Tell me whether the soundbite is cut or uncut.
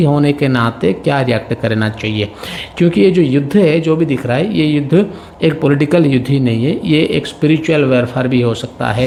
uncut